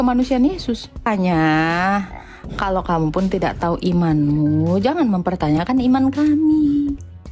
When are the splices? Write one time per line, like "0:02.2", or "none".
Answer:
0:01.1